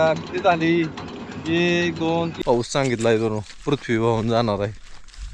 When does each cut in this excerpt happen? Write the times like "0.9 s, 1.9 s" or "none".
2.3 s